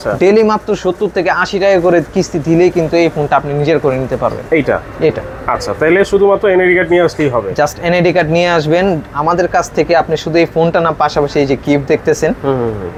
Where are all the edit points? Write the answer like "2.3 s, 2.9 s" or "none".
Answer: none

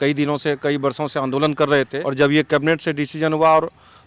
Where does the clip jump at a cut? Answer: 2.0 s

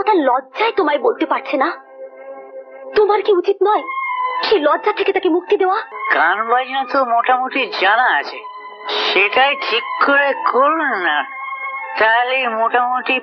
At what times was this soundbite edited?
5.9 s

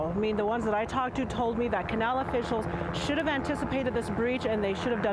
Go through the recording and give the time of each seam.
none

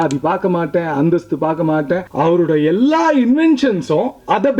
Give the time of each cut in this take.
2.1 s

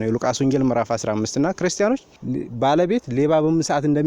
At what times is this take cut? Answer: 2.1 s

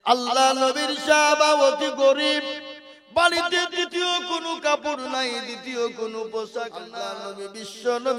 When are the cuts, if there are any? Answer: 6.9 s

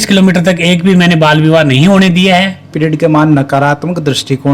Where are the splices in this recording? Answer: 2.6 s

